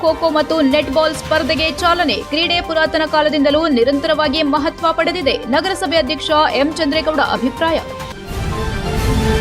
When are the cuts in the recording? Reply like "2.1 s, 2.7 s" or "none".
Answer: 8.0 s